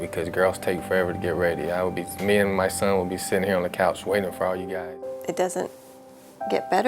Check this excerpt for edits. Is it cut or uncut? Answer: cut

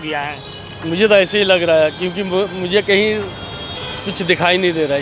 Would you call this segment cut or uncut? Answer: uncut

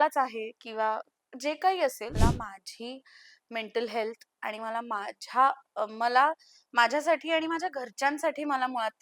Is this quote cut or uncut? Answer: cut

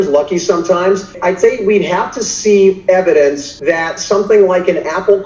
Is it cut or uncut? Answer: cut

